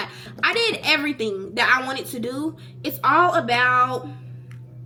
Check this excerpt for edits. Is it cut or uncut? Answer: uncut